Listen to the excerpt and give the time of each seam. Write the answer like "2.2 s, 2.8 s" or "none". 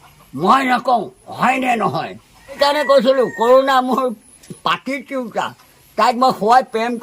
2.6 s